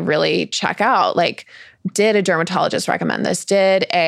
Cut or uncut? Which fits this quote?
uncut